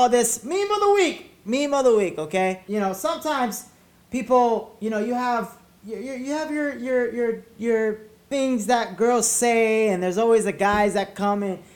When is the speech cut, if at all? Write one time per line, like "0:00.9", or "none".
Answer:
0:02.6
0:08.1